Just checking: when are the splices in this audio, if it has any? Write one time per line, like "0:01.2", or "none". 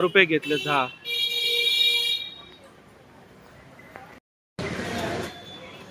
none